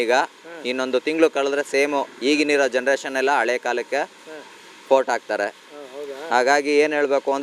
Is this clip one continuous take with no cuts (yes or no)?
yes